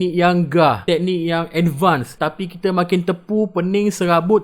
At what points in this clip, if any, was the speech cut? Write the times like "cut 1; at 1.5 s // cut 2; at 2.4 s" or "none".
cut 1; at 2.1 s

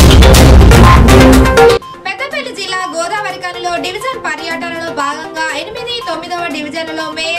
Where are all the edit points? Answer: cut 1; at 1.7 s

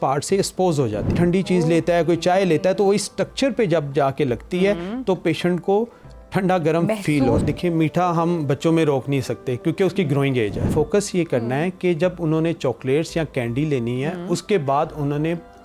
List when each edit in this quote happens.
cut 1; at 1.1 s // cut 2; at 7.4 s // cut 3; at 10.7 s

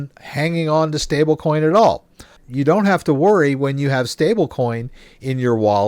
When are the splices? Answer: cut 1; at 2.4 s

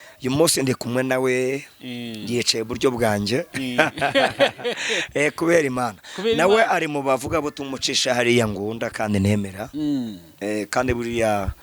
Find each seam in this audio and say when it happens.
none

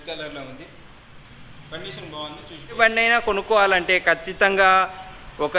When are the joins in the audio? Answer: cut 1; at 2.8 s

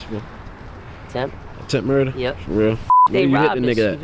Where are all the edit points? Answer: cut 1; at 3.1 s

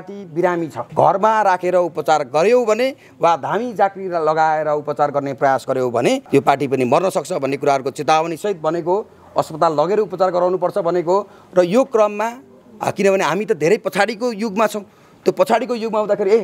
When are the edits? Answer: none

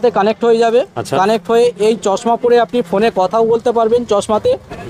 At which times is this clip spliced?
none

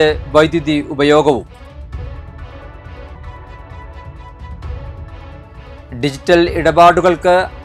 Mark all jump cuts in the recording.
none

